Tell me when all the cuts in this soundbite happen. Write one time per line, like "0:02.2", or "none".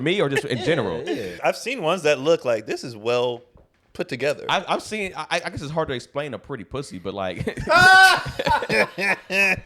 0:01.3